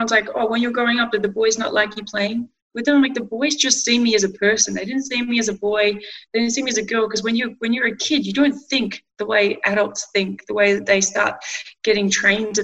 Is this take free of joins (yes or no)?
yes